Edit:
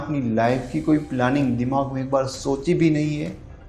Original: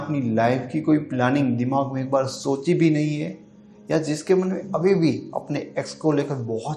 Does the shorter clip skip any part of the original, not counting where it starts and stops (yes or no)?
no